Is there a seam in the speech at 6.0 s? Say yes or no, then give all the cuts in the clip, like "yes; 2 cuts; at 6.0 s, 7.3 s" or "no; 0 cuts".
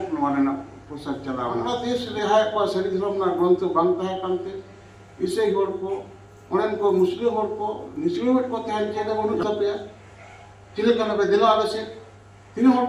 no; 2 cuts; at 1.8 s, 9.0 s